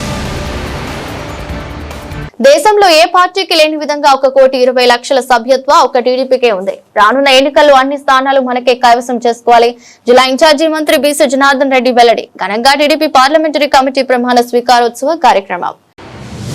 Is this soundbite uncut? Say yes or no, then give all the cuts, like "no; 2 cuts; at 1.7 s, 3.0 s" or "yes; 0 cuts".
no; 1 cut; at 2.2 s